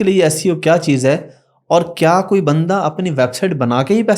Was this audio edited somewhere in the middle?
no; 0 cuts

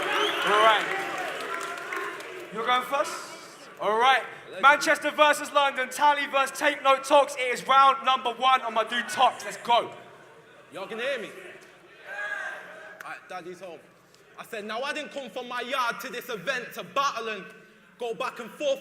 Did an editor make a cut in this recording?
yes; 1 cut; at 16.4 s

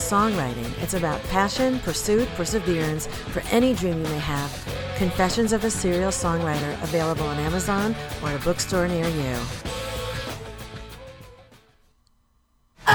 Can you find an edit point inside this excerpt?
no; 0 cuts

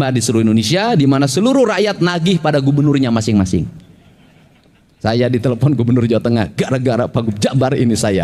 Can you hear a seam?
no; 0 cuts

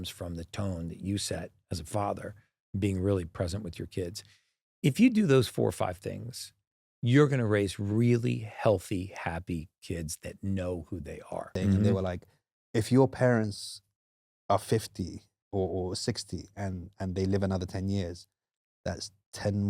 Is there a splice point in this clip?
yes; 1 cut; at 11.5 s

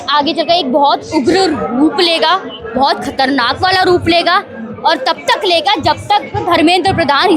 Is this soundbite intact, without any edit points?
yes; 0 cuts

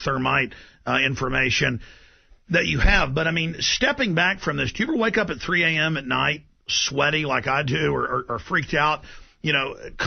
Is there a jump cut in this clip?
yes; 1 cut; at 5.4 s

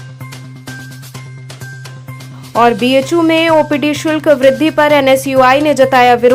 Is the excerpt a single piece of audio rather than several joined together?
yes; 0 cuts

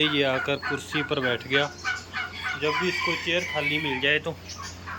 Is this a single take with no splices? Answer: yes; 0 cuts

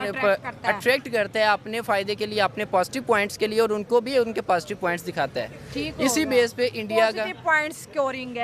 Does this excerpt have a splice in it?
no; 0 cuts

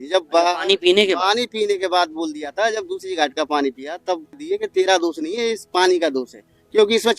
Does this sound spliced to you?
yes; 1 cut; at 4.4 s

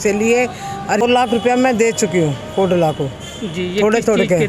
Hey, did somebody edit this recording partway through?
yes; 1 cut; at 1.0 s

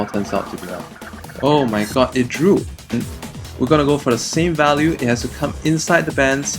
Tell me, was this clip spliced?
yes; 1 cut; at 2.9 s

